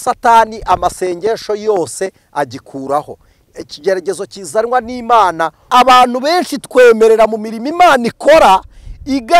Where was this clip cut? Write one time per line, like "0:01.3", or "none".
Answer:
0:05.6